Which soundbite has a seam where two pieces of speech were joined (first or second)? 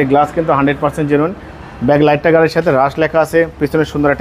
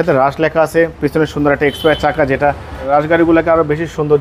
second